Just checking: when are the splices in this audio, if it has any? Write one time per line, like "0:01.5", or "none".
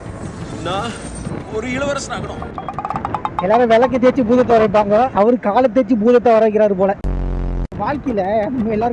none

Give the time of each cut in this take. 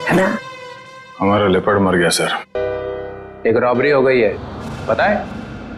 0:02.4

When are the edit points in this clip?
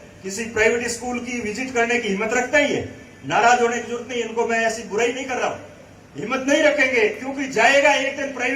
none

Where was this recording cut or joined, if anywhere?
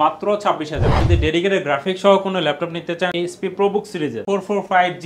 0:01.0
0:03.1
0:04.2

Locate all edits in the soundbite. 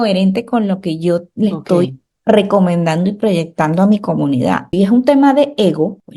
0:04.7

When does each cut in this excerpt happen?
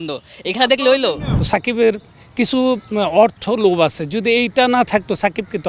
0:01.5

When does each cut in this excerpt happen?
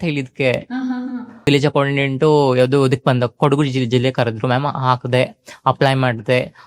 0:01.4

